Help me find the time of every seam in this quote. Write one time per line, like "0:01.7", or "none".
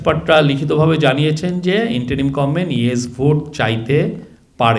none